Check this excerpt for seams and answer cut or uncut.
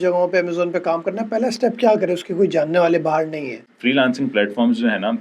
cut